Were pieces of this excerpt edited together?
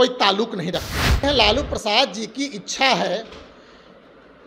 yes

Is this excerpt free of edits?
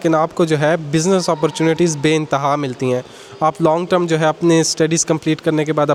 yes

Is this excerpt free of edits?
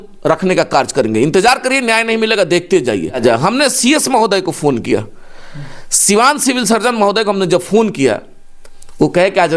no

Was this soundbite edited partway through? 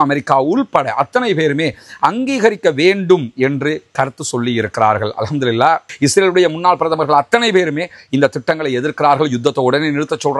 yes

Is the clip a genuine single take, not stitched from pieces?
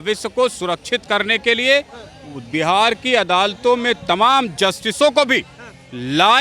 yes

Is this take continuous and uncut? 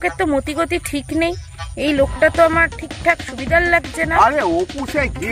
no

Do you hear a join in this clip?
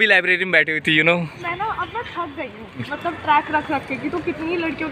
yes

